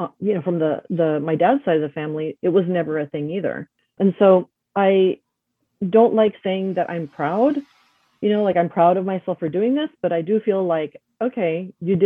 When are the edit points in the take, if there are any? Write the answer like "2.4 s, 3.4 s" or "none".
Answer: 3.9 s, 4.5 s